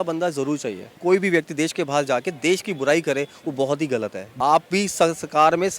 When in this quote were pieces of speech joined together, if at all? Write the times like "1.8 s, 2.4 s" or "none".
0.9 s, 4.2 s

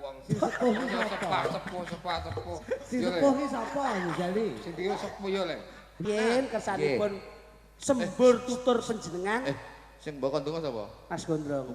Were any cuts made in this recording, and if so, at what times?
5.9 s

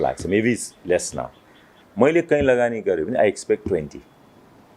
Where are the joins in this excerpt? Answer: 1.8 s

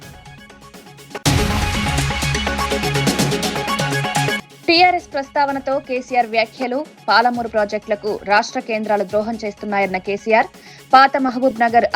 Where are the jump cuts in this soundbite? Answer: 0.9 s

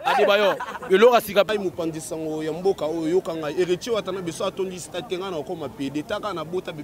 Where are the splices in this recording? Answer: 1.5 s

